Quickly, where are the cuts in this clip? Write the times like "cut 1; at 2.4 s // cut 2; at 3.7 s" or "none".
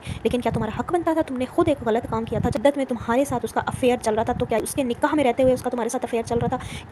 cut 1; at 2.6 s // cut 2; at 4.6 s